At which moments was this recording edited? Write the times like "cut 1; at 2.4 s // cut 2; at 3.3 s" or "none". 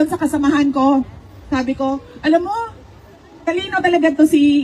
none